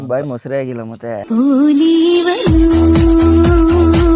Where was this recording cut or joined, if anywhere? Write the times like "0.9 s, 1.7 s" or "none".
1.1 s